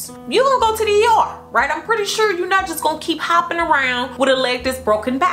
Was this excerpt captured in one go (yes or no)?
no